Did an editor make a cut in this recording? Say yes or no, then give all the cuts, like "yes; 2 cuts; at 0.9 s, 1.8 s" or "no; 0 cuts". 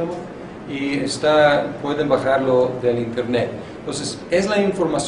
yes; 1 cut; at 3.8 s